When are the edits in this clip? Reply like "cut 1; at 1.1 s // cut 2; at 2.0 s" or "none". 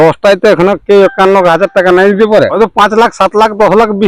cut 1; at 2.5 s